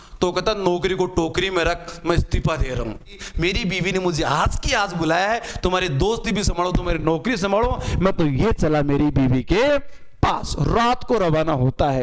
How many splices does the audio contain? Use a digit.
1